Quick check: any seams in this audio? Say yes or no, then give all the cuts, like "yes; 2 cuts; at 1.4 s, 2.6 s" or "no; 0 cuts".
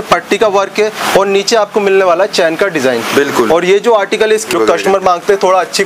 yes; 1 cut; at 4.5 s